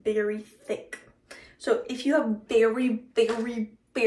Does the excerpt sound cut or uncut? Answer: uncut